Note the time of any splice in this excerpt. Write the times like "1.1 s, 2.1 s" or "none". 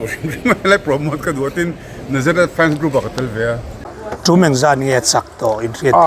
3.9 s